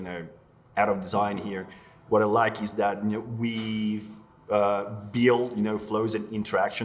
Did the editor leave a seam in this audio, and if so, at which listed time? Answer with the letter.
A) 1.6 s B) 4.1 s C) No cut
C